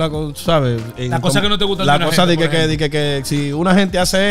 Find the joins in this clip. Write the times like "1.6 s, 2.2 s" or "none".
none